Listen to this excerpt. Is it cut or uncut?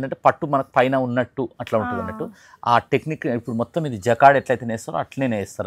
uncut